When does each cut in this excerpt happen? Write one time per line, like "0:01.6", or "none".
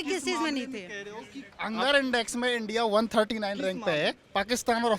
0:01.5